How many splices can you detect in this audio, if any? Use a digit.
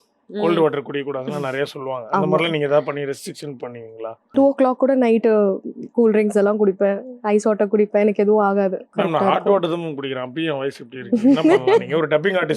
2